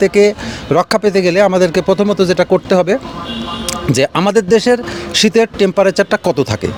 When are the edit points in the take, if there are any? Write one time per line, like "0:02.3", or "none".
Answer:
none